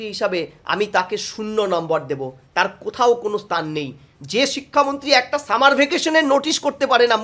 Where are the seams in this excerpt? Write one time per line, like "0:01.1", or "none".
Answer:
none